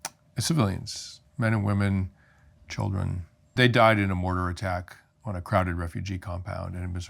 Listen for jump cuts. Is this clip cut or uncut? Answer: cut